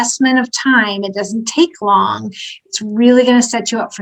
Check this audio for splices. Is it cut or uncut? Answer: uncut